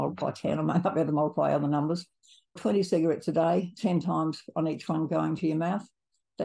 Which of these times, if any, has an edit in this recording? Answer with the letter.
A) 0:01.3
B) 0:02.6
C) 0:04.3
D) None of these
B